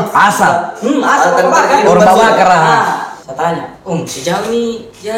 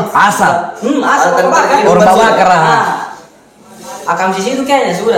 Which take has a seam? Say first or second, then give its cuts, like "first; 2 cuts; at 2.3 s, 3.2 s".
first; 1 cut; at 3.2 s